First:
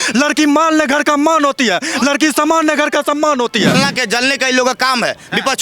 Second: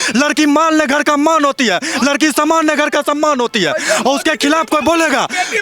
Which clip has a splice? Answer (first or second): first